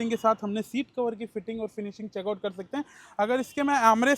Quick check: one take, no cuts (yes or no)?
yes